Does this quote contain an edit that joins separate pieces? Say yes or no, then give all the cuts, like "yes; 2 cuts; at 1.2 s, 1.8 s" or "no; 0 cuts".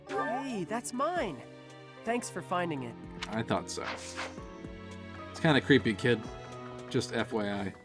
no; 0 cuts